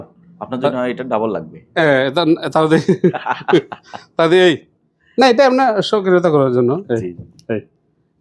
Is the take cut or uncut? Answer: uncut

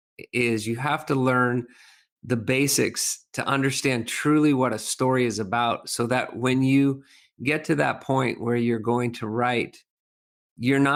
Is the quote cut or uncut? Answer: uncut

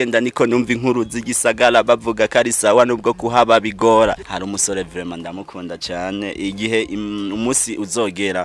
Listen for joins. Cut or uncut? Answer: cut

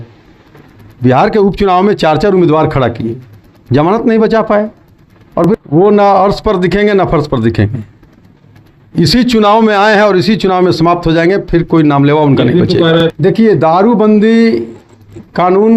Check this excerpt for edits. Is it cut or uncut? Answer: cut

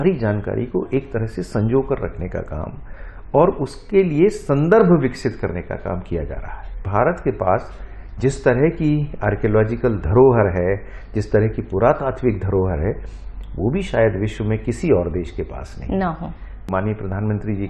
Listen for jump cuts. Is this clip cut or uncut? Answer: cut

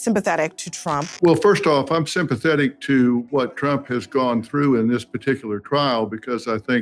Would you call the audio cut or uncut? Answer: cut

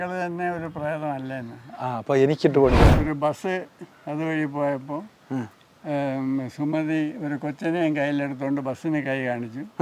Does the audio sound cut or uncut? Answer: cut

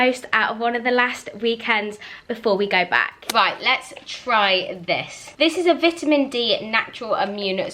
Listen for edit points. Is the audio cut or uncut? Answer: uncut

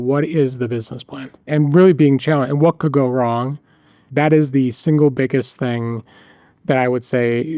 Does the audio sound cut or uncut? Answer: cut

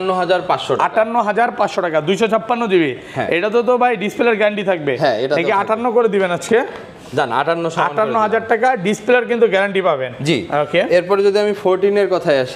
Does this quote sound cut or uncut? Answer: uncut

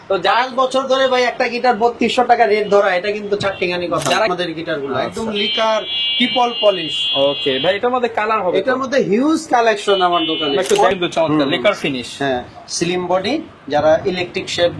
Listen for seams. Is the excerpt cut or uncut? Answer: cut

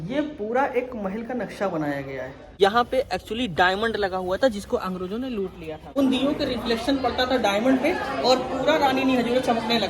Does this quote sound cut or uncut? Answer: cut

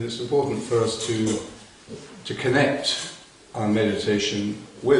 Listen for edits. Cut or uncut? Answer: cut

